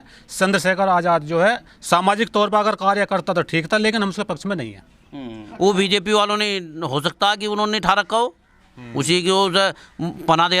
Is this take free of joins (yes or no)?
no